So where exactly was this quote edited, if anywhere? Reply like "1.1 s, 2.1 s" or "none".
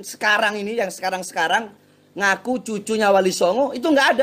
none